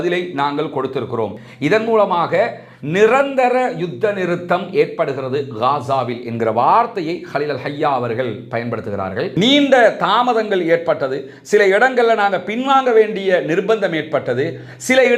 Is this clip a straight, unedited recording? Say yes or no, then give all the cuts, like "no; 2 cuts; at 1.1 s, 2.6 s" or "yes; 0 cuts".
no; 2 cuts; at 1.3 s, 9.3 s